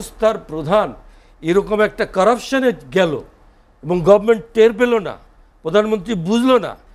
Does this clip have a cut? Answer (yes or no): no